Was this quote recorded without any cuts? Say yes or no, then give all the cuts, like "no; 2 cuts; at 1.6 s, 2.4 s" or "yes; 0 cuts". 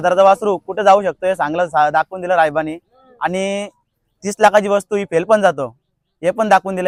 yes; 0 cuts